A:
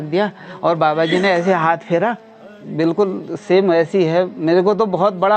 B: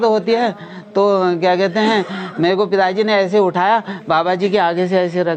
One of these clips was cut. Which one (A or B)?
A